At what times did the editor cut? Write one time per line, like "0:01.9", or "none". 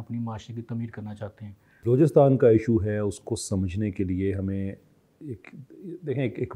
0:01.8